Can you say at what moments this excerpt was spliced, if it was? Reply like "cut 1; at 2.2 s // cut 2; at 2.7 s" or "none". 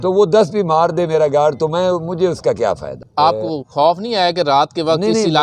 cut 1; at 3.0 s